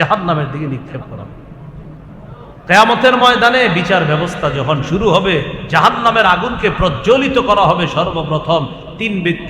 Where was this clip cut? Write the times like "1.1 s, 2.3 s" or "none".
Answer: 2.6 s

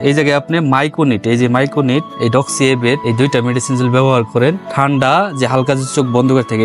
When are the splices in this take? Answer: 2.1 s, 3.0 s, 4.7 s

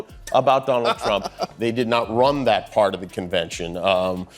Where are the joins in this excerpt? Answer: 1.5 s

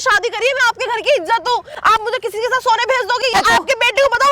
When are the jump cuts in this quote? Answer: 3.3 s

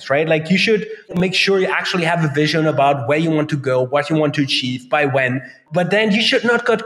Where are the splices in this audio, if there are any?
1.1 s, 5.5 s

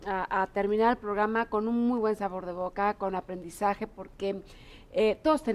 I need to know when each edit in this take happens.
1.3 s

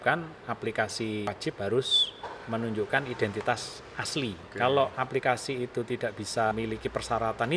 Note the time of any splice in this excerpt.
1.3 s, 4.5 s, 6.5 s

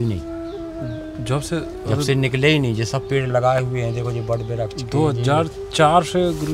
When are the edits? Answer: none

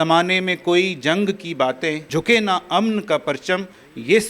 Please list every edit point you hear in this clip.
2.0 s

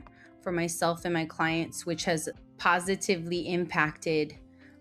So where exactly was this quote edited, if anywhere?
2.4 s

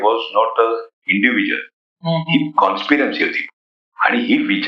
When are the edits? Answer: none

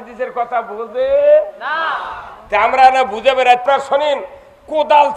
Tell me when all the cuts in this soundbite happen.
3.6 s

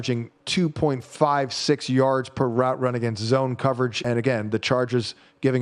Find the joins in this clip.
4.0 s

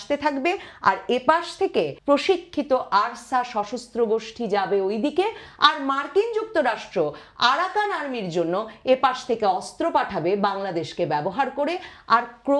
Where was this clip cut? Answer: 2.0 s

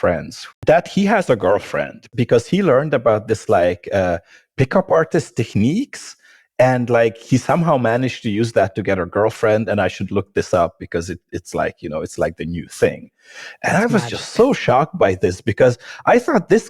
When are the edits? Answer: 2.1 s, 7.3 s

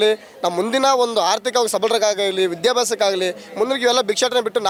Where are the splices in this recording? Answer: none

